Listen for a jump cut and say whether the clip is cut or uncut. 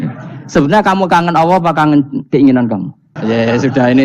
cut